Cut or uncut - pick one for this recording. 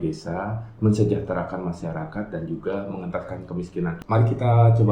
cut